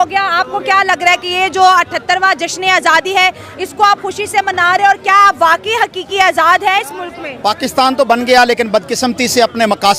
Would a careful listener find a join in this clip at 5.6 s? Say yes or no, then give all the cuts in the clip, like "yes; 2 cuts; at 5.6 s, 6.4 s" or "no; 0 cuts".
no; 0 cuts